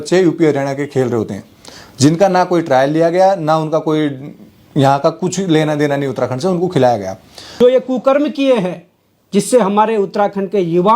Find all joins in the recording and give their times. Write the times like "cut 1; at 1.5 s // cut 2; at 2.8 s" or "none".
cut 1; at 7.6 s